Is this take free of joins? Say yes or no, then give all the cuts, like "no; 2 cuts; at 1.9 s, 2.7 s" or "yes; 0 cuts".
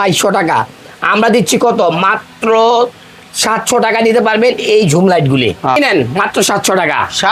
no; 1 cut; at 5.8 s